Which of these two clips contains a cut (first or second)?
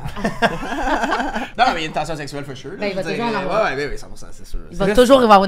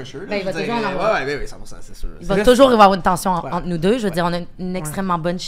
first